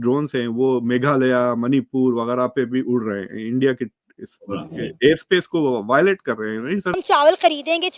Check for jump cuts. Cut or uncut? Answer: cut